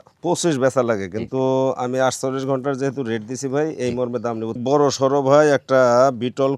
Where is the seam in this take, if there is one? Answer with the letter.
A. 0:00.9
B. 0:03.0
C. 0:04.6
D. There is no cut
C